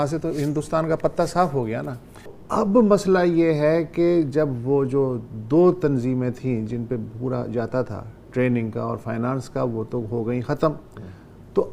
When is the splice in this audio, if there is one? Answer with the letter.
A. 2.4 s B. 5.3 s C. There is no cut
A